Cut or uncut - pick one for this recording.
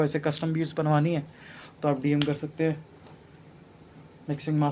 uncut